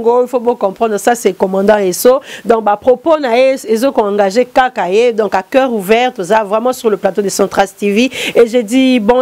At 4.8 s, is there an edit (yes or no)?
yes